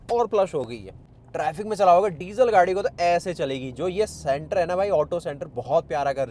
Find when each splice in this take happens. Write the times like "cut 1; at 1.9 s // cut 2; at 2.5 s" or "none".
cut 1; at 1.2 s